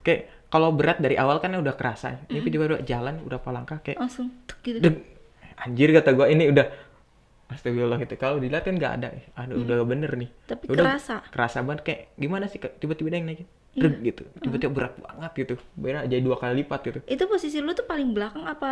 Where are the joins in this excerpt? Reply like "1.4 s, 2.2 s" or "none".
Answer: none

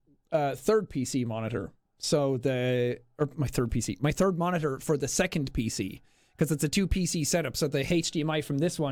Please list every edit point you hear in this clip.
none

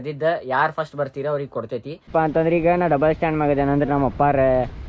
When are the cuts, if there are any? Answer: 2.1 s

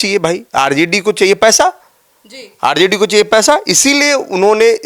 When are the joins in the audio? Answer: none

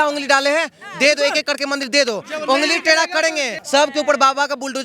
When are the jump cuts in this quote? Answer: 3.6 s

